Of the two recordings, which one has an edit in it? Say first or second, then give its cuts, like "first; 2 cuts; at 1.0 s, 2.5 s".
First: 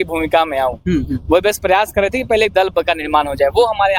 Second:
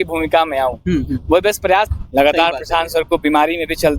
second; 1 cut; at 1.9 s